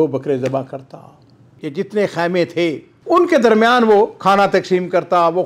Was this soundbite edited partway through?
yes; 1 cut; at 1.5 s

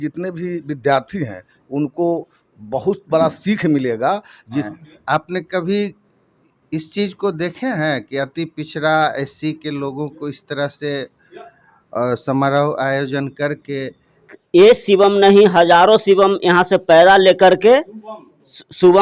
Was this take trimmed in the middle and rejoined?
yes; 2 cuts; at 4.7 s, 14.3 s

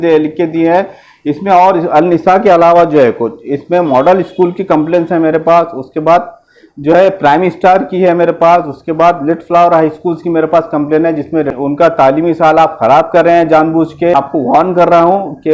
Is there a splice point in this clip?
yes; 2 cuts; at 11.5 s, 14.2 s

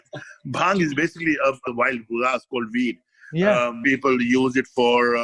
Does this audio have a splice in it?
yes; 2 cuts; at 1.6 s, 3.8 s

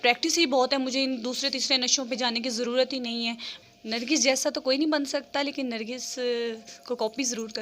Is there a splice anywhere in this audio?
yes; 1 cut; at 3.5 s

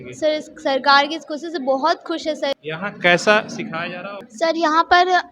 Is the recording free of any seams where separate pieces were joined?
no; 2 cuts; at 2.5 s, 4.2 s

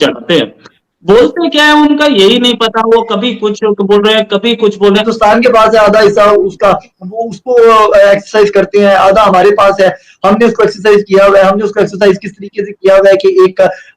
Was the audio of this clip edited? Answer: yes; 1 cut; at 5.1 s

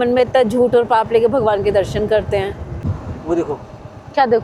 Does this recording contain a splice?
yes; 1 cut; at 2.9 s

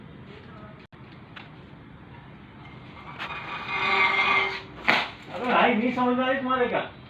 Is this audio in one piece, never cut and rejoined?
yes; 0 cuts

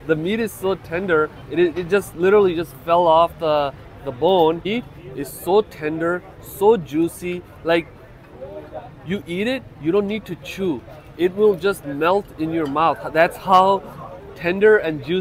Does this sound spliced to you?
yes; 1 cut; at 4.7 s

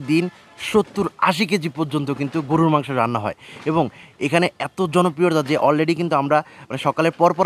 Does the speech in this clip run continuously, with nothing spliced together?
yes; 0 cuts

